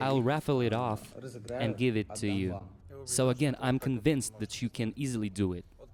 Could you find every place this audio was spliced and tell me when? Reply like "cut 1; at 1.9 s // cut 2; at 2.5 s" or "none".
none